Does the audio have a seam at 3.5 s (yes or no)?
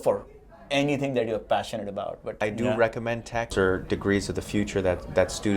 yes